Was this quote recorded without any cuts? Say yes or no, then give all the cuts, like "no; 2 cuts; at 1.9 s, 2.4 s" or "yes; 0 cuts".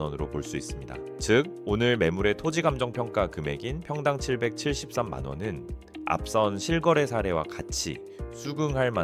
yes; 0 cuts